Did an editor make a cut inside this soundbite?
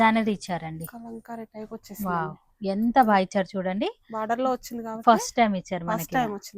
no; 0 cuts

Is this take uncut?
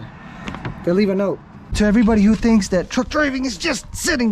no; 1 cut; at 1.7 s

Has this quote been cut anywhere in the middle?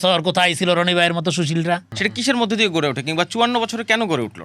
yes; 1 cut; at 1.9 s

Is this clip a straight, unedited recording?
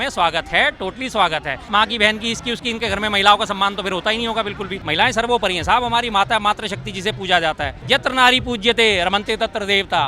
no; 3 cuts; at 1.6 s, 4.7 s, 7.7 s

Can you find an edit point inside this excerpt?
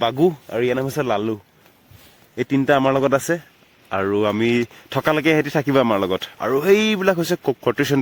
no; 0 cuts

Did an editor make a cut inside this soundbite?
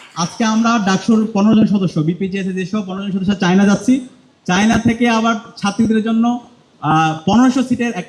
no; 0 cuts

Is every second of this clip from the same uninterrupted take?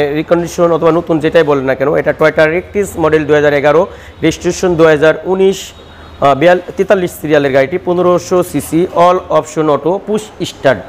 yes; 0 cuts

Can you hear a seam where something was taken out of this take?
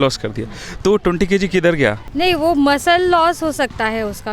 yes; 1 cut; at 2.0 s

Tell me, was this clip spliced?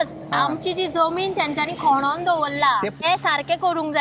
yes; 1 cut; at 3.0 s

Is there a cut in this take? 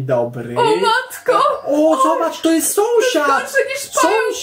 no; 0 cuts

